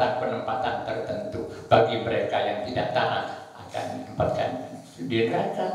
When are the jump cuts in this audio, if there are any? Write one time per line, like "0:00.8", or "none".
none